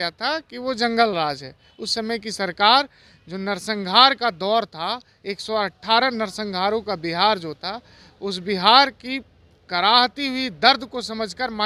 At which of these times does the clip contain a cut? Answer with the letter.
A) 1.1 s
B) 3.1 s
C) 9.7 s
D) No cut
D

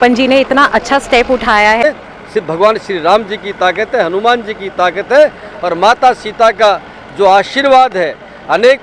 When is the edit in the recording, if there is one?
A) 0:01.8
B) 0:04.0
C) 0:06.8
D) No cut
A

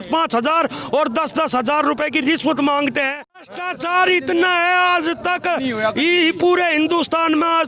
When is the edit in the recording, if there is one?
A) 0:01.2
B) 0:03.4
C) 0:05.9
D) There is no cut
B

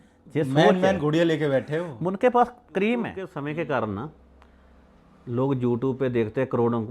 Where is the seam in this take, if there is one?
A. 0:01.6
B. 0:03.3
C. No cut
B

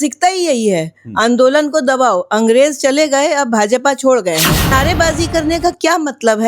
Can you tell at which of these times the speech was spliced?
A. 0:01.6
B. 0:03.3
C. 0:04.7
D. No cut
C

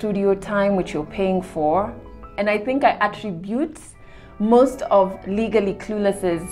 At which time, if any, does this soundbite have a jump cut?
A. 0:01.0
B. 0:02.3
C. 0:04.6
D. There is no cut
B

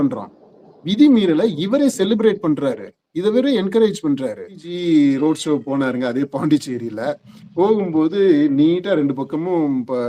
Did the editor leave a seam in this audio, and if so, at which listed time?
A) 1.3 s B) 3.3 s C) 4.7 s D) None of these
C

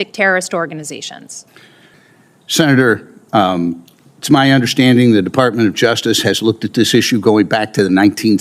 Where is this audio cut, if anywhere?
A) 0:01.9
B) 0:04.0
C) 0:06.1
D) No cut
A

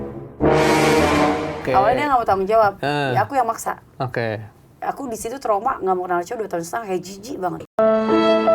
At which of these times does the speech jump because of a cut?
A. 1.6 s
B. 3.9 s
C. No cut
A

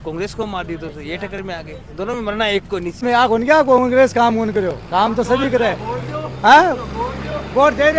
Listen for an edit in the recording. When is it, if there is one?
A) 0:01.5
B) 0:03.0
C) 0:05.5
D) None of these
B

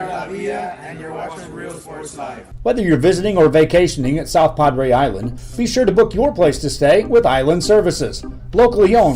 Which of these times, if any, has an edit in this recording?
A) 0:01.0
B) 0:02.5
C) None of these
B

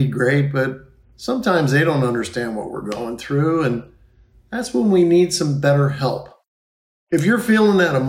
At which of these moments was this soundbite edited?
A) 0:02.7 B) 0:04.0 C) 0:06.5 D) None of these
D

